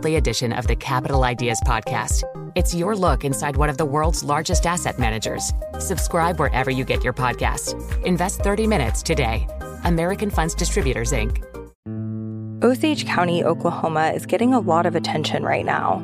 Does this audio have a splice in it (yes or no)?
yes